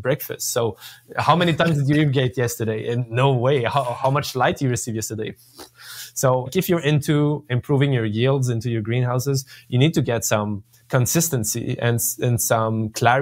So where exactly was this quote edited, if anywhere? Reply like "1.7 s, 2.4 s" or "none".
none